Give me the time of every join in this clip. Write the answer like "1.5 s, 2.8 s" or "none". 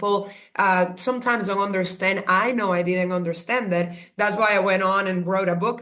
none

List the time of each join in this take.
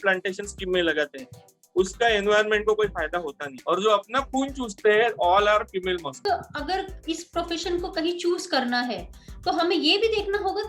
3.5 s, 6.2 s

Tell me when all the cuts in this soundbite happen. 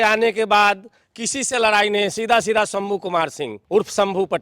3.5 s

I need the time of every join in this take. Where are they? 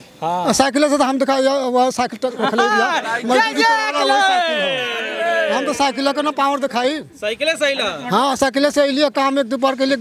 none

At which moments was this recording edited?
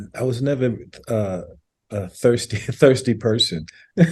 none

